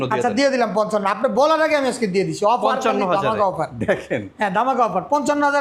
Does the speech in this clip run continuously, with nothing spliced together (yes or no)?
yes